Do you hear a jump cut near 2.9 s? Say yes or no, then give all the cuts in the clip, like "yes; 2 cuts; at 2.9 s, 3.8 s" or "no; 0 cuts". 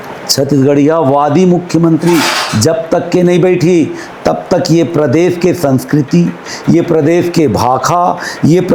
no; 0 cuts